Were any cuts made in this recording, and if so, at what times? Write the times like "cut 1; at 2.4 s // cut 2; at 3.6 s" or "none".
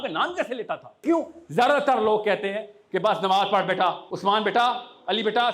cut 1; at 1.0 s // cut 2; at 4.1 s